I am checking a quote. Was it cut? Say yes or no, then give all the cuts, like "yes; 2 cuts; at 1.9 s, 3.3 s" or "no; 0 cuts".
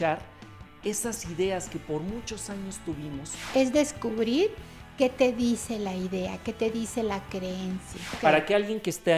yes; 2 cuts; at 3.5 s, 8.2 s